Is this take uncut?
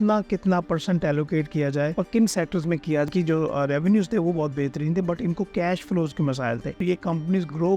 no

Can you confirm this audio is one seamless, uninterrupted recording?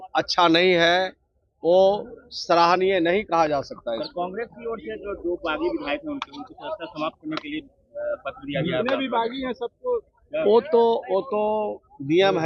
yes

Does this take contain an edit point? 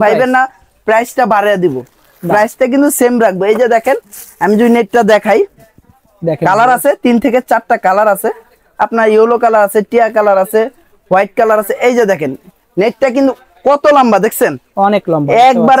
no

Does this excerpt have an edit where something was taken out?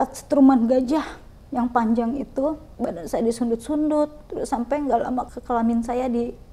yes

